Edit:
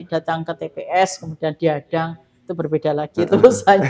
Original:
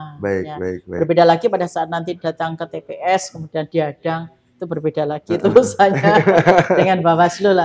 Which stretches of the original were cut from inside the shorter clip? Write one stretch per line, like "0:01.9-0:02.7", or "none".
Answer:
none